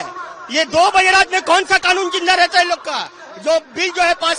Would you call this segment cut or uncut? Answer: uncut